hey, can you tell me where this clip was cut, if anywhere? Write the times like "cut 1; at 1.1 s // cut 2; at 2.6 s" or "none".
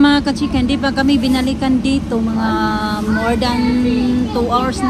none